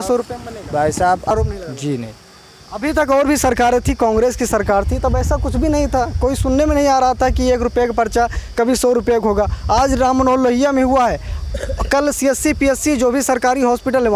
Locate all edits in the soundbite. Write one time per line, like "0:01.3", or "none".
0:01.3